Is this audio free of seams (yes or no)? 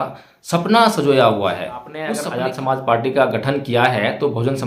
no